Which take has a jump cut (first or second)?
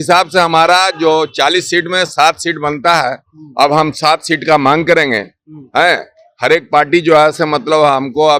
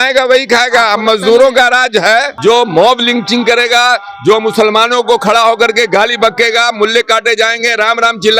second